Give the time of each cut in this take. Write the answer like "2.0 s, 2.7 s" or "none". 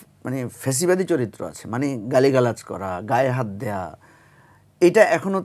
none